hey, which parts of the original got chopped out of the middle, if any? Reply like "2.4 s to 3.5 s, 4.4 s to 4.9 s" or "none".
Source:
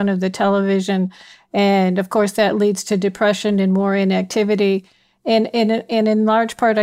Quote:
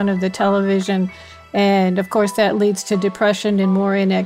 none